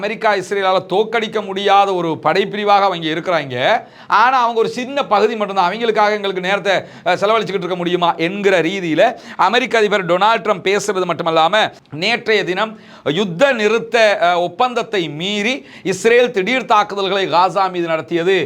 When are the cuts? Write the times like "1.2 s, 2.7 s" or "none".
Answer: 11.8 s